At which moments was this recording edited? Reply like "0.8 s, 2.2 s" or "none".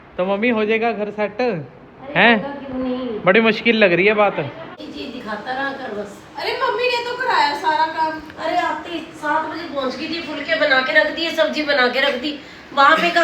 4.8 s